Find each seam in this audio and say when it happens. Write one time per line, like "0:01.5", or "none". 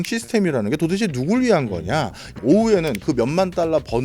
0:02.4